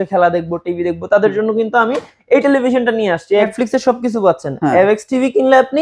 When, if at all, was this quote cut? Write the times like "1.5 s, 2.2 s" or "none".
3.5 s